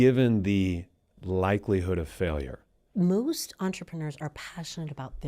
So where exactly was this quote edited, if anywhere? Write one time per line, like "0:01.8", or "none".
0:02.8